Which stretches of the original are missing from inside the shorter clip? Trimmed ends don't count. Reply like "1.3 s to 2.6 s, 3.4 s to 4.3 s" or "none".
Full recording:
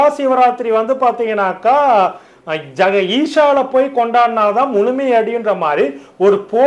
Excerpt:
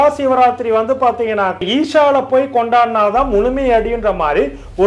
1.6 s to 3.0 s